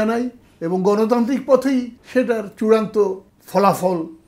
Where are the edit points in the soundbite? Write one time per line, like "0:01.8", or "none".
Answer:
0:02.0
0:03.3